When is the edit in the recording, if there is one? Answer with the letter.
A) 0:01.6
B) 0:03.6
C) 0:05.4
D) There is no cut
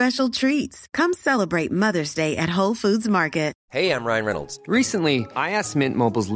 B